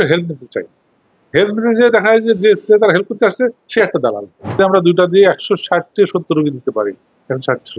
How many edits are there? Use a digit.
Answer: 1